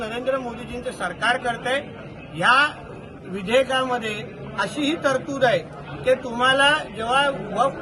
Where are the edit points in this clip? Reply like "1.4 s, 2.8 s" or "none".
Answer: none